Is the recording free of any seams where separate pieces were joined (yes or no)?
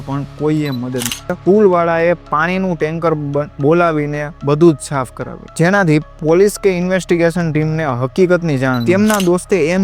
no